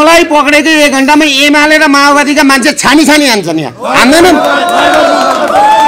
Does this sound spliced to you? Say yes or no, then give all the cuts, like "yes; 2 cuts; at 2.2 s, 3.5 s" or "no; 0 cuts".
no; 0 cuts